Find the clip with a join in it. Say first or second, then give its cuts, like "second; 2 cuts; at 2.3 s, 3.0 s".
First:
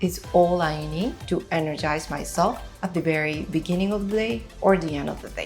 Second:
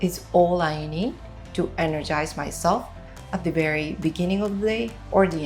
first; 2 cuts; at 1.2 s, 2.7 s